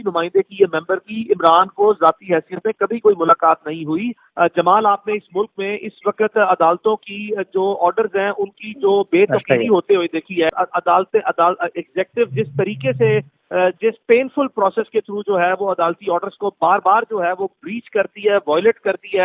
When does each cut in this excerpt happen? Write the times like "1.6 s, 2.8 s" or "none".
4.2 s, 10.5 s